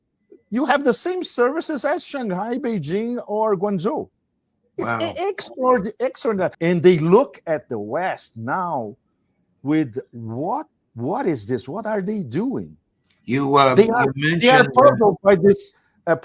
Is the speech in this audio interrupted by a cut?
yes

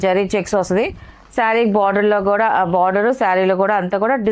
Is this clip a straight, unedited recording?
yes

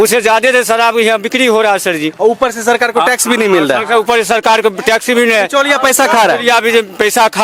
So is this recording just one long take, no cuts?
yes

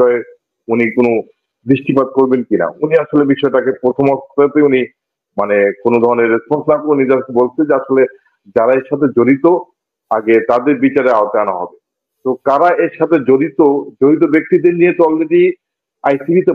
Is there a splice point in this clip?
no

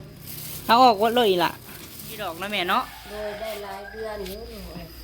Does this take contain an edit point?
yes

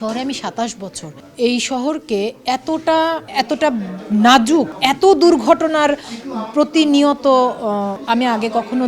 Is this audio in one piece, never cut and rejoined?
yes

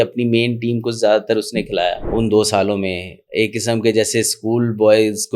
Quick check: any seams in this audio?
yes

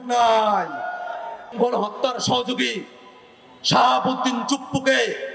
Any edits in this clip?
yes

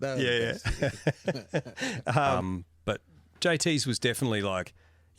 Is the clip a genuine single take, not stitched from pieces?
no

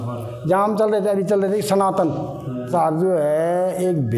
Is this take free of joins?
no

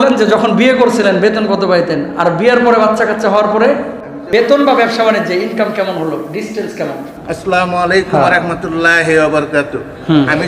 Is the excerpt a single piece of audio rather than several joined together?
no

